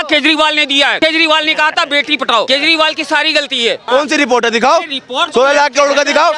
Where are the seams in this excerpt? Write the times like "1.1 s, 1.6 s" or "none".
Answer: 1.0 s, 2.5 s, 3.8 s